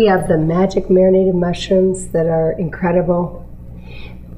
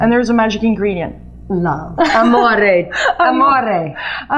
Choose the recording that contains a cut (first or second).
first